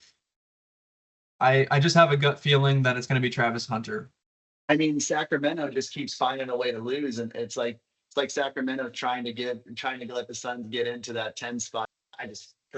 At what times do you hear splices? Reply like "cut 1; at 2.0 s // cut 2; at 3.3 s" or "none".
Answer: cut 1; at 4.2 s // cut 2; at 11.9 s